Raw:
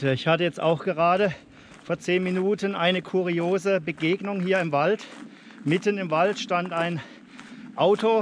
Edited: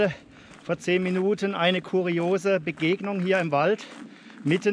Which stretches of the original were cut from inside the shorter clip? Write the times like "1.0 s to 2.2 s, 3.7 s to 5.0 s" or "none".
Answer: none